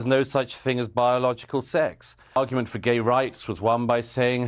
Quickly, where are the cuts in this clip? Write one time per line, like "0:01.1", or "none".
0:02.4